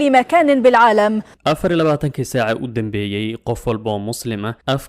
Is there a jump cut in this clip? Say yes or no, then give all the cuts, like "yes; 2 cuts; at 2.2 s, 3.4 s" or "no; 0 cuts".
yes; 1 cut; at 1.2 s